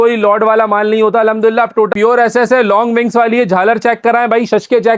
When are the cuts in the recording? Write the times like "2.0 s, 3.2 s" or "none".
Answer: 1.9 s